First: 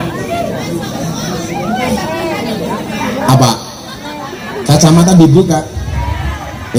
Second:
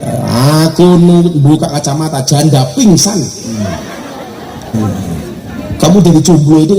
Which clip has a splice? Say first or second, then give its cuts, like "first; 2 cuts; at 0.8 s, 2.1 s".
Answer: second; 1 cut; at 4.7 s